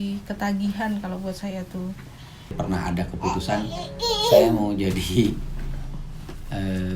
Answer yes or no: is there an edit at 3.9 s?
no